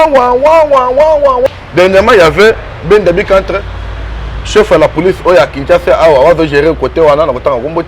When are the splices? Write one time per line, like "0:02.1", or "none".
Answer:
0:01.5